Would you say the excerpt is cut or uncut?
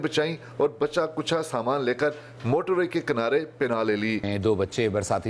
cut